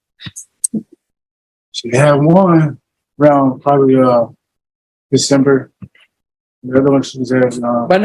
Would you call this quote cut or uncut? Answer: uncut